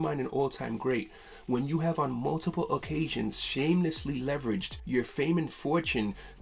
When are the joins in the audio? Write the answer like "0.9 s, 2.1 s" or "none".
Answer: 4.7 s